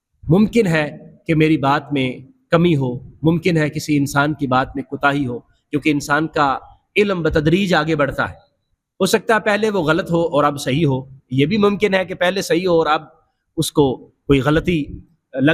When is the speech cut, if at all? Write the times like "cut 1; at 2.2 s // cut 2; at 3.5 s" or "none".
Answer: none

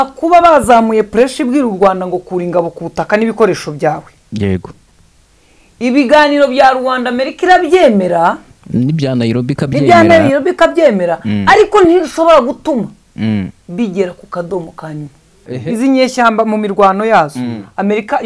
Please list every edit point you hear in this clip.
cut 1; at 15.5 s

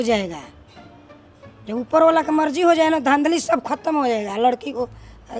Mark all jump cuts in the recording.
none

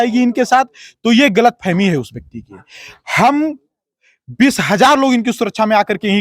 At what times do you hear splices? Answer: none

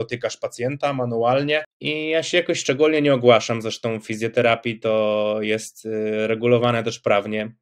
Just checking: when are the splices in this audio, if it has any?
cut 1; at 1.8 s

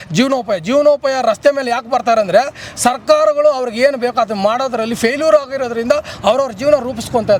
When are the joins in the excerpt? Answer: none

